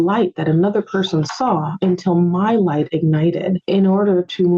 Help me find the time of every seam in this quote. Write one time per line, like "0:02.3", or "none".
0:03.6